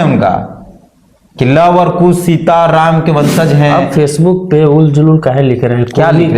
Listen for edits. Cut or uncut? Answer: cut